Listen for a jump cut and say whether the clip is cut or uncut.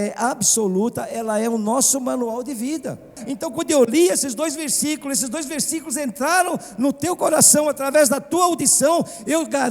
cut